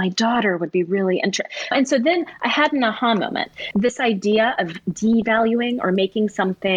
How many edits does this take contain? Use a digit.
2